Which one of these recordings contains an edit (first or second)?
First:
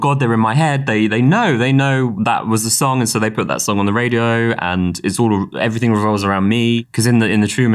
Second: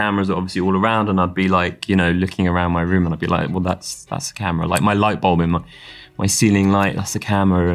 first